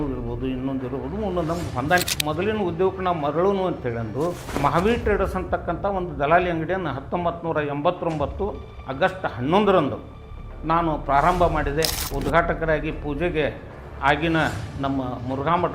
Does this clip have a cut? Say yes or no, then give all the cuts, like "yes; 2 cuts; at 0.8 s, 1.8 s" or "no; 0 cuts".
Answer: yes; 3 cuts; at 2.1 s, 4.5 s, 12.0 s